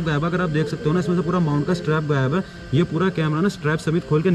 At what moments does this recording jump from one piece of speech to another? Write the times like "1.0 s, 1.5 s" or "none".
none